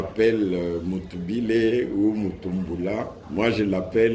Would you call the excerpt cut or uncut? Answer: cut